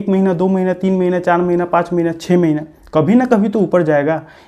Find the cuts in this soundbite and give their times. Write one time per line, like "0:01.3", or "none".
none